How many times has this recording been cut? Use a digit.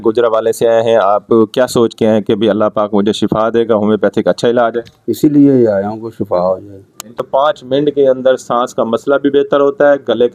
1